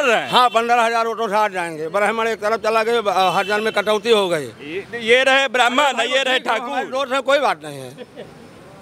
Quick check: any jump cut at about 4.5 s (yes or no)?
no